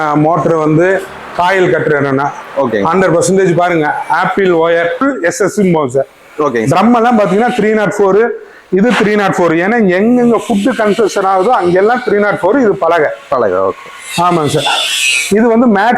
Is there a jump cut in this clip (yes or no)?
yes